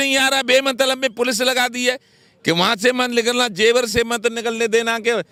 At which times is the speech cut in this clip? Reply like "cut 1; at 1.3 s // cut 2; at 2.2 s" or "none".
none

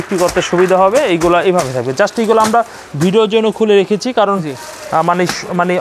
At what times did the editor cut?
none

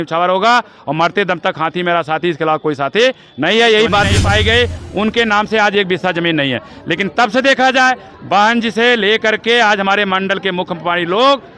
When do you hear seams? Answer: cut 1; at 4.2 s

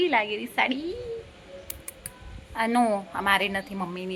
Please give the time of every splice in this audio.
none

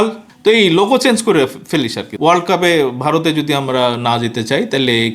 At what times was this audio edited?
cut 1; at 2.1 s

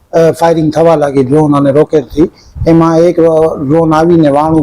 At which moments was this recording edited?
none

